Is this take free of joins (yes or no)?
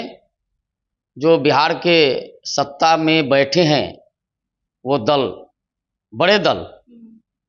yes